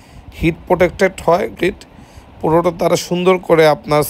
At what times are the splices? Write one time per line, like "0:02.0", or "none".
0:01.5